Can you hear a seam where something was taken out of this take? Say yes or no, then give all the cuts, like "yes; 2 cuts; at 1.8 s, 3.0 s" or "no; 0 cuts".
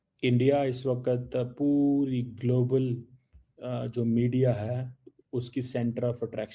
no; 0 cuts